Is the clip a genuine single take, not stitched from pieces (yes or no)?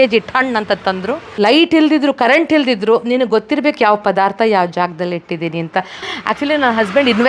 no